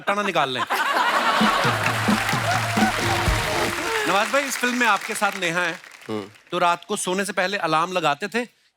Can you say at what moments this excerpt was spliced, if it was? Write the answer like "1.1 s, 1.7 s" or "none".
none